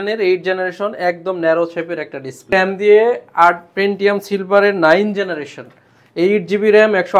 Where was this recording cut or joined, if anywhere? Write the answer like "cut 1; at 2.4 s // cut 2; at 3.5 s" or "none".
cut 1; at 2.5 s